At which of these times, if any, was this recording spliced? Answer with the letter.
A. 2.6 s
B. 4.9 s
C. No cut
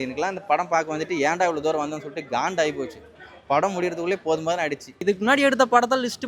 B